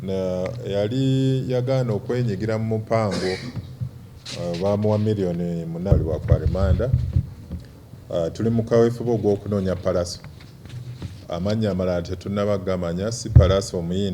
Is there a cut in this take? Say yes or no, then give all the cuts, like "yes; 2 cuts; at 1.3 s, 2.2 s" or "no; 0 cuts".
yes; 1 cut; at 5.9 s